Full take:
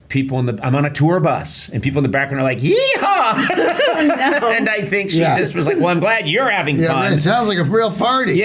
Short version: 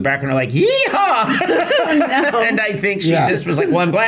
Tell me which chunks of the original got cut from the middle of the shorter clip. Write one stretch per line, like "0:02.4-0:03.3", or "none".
none